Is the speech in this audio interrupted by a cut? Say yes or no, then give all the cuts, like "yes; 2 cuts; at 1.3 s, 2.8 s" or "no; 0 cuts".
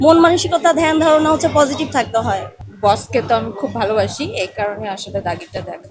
yes; 1 cut; at 2.5 s